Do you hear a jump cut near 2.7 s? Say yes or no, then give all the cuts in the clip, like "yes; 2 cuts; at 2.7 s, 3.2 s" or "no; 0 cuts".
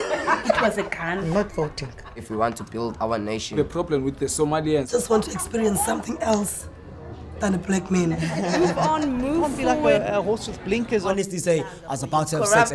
yes; 1 cut; at 2.7 s